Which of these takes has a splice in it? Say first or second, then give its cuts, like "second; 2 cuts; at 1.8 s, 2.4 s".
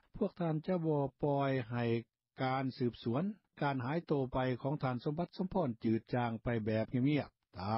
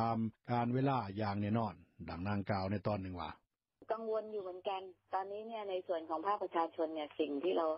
second; 1 cut; at 6.8 s